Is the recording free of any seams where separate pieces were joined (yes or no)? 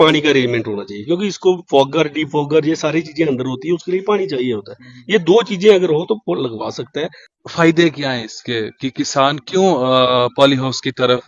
no